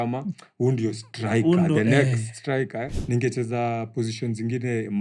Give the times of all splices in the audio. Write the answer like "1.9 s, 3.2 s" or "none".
2.9 s